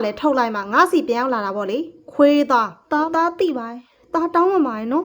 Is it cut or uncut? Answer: cut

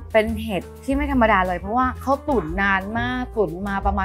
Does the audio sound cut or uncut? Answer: uncut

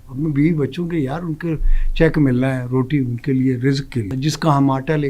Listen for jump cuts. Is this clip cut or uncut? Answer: cut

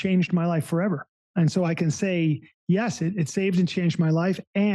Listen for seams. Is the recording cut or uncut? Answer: cut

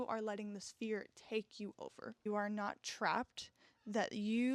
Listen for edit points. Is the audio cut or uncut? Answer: cut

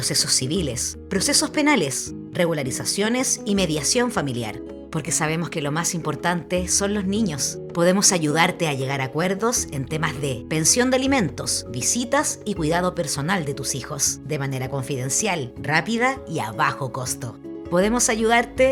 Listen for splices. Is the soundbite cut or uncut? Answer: uncut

